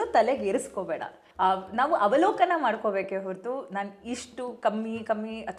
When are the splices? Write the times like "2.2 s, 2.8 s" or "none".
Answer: 1.2 s